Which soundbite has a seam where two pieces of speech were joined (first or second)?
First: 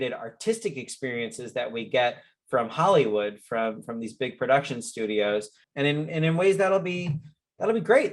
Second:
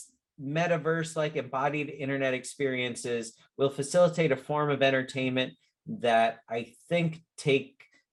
first